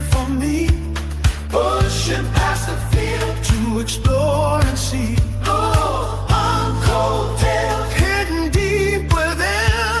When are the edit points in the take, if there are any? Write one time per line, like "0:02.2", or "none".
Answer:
none